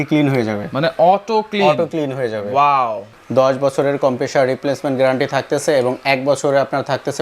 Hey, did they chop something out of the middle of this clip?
yes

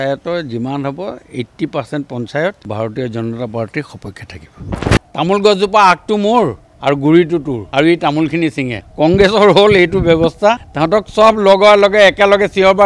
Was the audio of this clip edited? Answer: yes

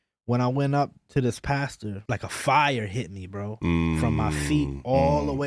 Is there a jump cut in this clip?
yes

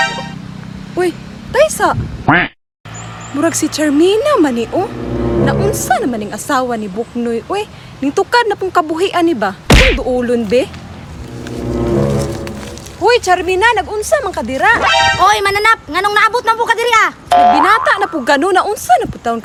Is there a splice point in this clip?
no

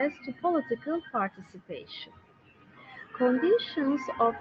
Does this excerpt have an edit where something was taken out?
no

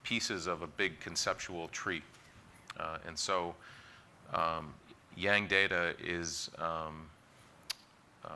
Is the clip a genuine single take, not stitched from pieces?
no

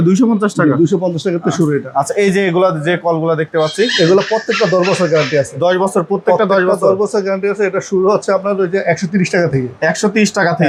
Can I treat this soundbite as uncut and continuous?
yes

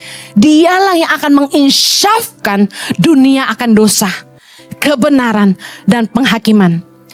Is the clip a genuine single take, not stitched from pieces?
yes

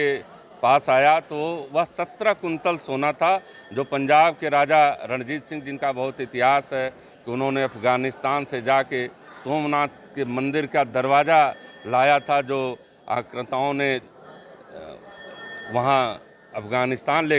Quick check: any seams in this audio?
no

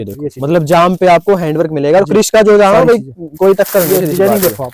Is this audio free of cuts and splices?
yes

